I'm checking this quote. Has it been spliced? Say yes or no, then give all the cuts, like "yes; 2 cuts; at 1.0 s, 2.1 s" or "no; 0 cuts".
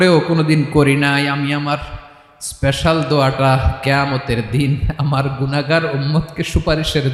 no; 0 cuts